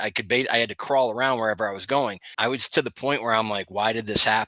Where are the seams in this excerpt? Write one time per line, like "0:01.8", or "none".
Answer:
0:02.2